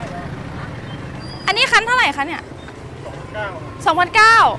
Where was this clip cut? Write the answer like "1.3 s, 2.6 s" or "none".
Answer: none

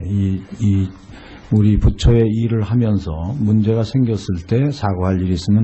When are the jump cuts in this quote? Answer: 2.5 s

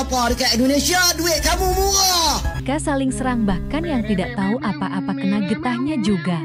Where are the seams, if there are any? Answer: 2.6 s

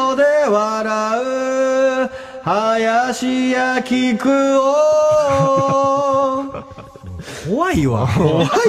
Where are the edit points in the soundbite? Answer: 2.0 s

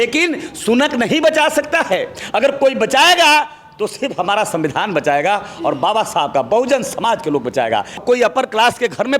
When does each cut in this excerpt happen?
8.0 s

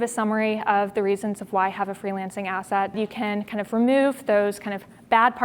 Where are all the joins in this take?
3.0 s

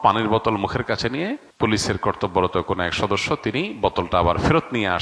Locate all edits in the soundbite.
1.4 s

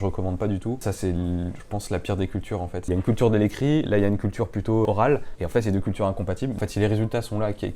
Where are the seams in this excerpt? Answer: 0.8 s, 2.9 s, 5.0 s, 6.6 s

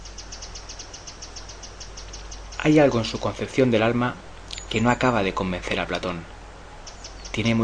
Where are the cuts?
none

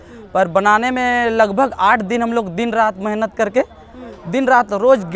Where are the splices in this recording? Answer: none

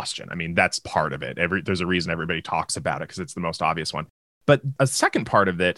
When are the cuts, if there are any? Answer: 4.7 s

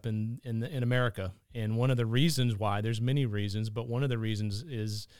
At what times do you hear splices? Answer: none

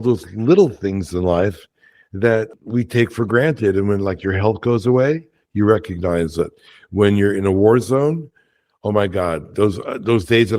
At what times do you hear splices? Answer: 2.5 s

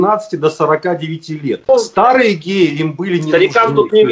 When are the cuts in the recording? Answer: 1.7 s

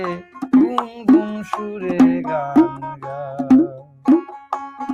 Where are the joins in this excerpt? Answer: none

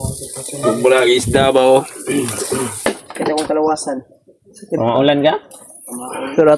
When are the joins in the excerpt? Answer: 2.7 s

